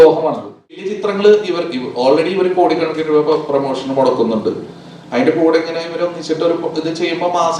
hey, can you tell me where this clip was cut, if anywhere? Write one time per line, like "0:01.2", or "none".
0:00.9

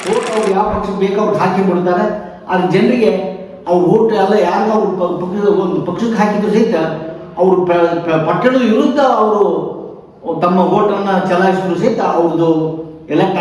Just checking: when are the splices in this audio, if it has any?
none

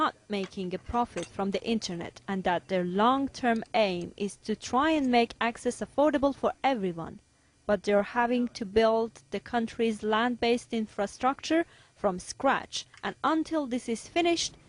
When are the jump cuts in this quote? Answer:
none

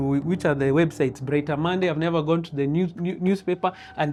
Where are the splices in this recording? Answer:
none

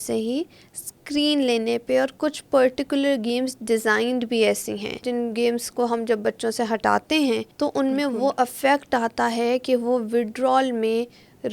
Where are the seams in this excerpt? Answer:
0:05.1
0:07.5

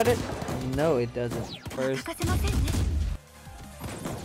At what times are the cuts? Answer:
0:01.7

